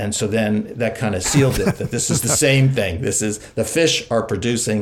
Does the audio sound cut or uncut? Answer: cut